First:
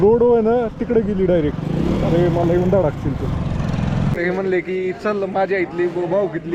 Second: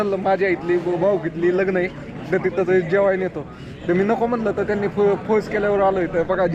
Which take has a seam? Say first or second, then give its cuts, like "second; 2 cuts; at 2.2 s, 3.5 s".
first; 1 cut; at 4.1 s